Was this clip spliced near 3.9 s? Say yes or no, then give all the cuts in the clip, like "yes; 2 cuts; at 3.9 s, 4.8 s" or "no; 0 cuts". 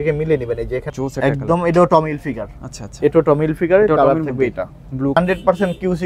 no; 2 cuts; at 0.9 s, 5.2 s